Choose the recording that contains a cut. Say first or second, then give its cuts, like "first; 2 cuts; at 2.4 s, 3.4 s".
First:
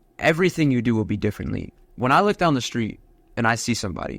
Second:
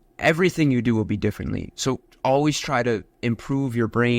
first; 1 cut; at 1.7 s